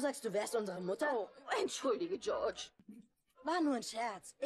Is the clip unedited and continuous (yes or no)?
no